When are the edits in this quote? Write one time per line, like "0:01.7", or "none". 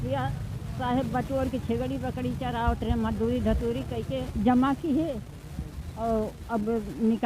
0:04.3